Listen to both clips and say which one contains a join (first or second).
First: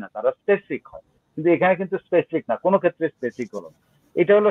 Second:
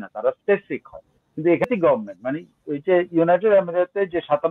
second